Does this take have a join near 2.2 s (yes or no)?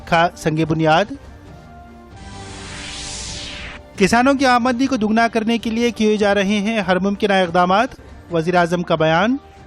yes